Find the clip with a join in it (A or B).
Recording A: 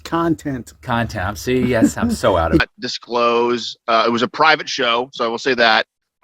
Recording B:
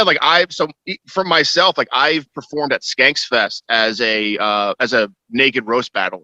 A